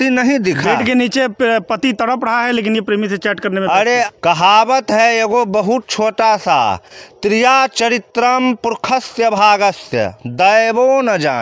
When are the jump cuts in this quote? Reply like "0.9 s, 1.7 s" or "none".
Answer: 4.1 s